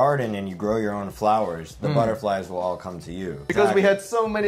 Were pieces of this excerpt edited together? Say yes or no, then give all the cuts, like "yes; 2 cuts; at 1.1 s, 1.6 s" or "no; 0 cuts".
yes; 1 cut; at 3.4 s